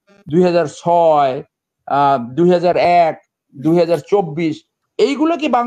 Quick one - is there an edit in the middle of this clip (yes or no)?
no